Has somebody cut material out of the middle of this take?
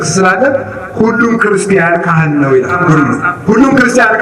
yes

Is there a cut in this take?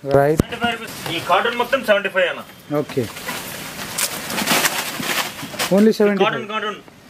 yes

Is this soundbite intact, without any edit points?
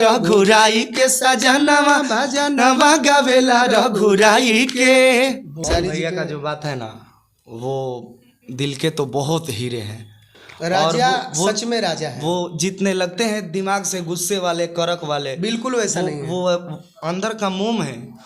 no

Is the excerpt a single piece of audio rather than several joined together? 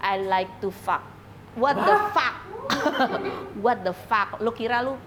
yes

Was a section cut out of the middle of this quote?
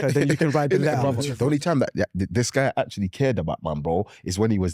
yes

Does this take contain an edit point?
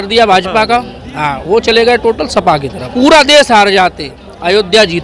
yes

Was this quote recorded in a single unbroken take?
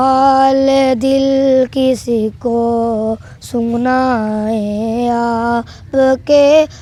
yes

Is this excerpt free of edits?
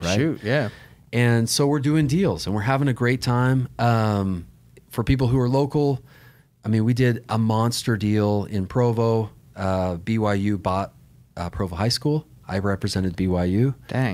yes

